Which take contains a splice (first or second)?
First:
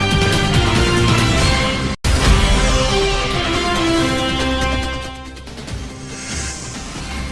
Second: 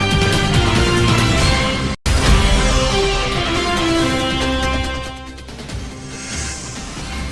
second